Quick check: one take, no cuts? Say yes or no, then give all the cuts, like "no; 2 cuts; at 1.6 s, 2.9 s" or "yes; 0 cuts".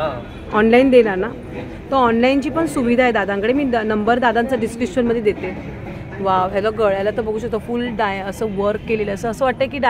yes; 0 cuts